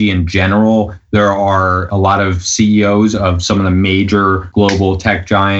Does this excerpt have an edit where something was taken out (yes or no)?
yes